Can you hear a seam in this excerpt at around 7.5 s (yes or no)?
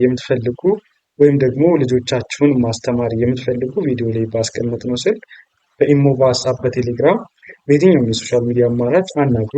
no